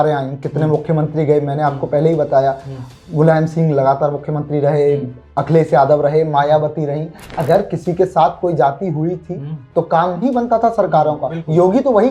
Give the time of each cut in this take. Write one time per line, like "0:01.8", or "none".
none